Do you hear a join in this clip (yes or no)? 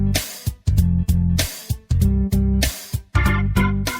yes